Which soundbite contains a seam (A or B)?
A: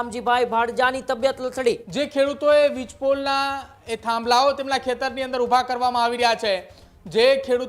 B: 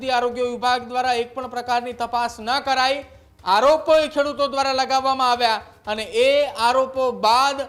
A